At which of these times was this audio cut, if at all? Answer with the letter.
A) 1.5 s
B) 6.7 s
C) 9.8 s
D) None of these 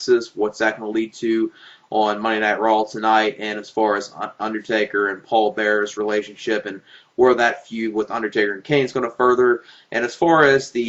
D